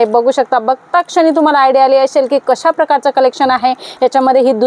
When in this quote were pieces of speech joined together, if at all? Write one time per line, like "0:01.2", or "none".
none